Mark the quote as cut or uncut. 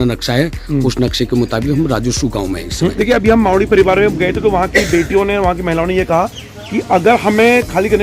cut